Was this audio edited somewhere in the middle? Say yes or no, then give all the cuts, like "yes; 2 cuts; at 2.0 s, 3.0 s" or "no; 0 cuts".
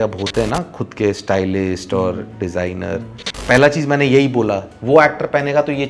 yes; 2 cuts; at 3.4 s, 4.7 s